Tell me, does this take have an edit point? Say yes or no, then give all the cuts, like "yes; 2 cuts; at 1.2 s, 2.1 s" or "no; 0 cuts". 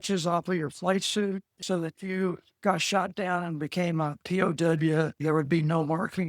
yes; 1 cut; at 1.6 s